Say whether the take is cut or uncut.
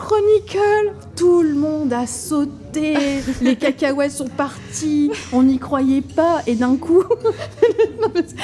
uncut